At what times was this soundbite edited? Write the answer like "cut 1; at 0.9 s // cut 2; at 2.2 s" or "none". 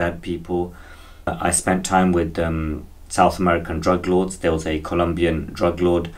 cut 1; at 1.3 s